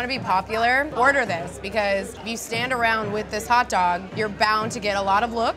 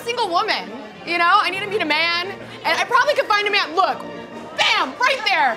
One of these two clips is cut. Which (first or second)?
first